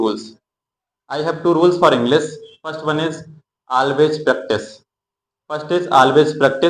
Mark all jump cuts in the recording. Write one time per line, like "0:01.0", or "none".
none